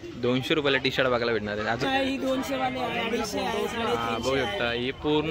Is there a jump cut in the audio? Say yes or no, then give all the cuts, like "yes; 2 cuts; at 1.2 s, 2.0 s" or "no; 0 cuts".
yes; 1 cut; at 1.8 s